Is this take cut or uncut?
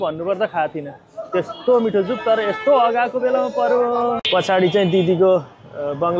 cut